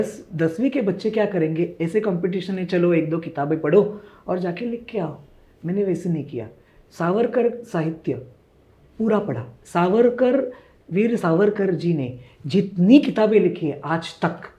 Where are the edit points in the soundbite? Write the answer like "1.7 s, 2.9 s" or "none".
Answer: none